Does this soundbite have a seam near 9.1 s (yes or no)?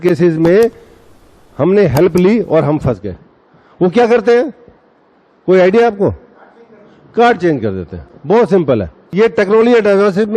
yes